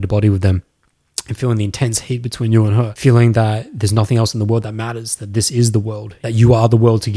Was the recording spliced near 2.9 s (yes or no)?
yes